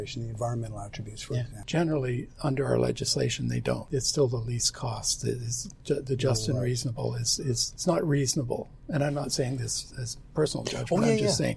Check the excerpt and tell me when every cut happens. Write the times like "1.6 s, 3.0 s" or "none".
1.6 s, 3.8 s, 7.7 s